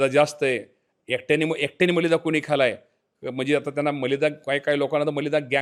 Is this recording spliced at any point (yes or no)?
no